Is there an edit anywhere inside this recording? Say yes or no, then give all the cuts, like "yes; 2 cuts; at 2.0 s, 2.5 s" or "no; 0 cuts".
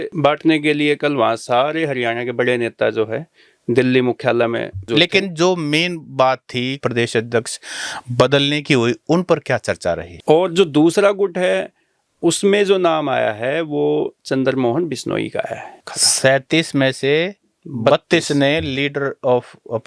yes; 4 cuts; at 4.9 s, 6.8 s, 10.1 s, 16.0 s